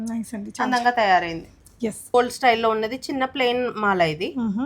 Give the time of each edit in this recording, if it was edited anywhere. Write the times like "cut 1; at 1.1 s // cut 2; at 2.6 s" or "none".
cut 1; at 2.1 s